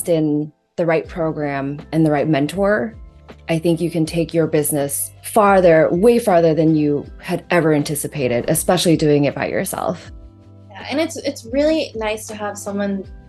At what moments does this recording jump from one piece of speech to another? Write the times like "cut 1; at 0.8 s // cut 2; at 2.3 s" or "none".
none